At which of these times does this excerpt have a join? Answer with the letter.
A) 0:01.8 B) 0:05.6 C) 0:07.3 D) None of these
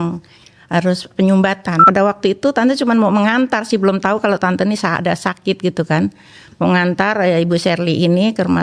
A